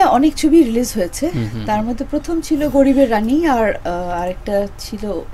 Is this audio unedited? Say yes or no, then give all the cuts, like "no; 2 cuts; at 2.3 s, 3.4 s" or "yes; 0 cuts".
yes; 0 cuts